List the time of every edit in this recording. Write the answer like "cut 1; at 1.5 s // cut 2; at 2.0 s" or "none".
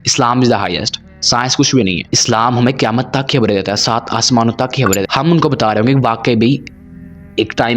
cut 1; at 5.1 s